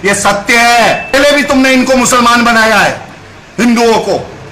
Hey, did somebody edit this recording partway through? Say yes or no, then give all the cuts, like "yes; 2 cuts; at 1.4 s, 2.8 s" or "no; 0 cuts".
yes; 1 cut; at 1.1 s